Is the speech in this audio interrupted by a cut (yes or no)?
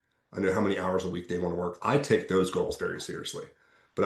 yes